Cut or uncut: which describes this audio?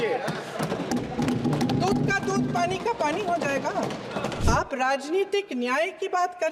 cut